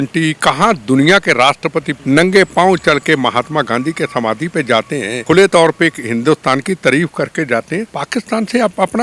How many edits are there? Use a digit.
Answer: 3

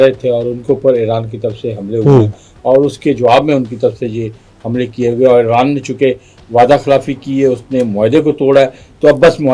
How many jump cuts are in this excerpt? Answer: 0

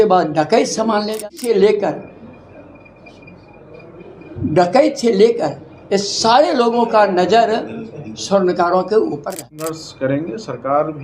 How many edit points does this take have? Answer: 2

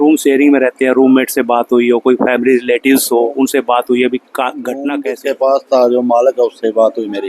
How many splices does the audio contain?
1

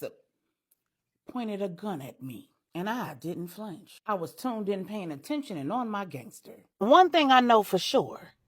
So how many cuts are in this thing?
0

